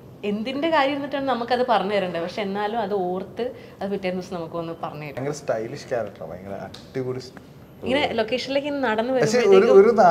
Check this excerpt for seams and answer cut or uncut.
cut